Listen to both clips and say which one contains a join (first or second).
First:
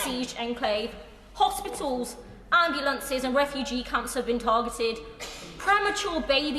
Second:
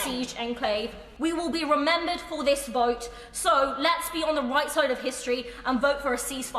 second